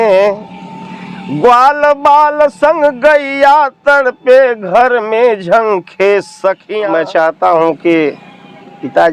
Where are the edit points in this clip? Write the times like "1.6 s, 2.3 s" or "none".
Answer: 6.7 s